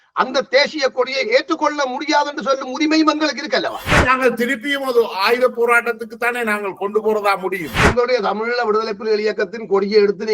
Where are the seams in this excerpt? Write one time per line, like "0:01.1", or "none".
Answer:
0:03.8
0:07.8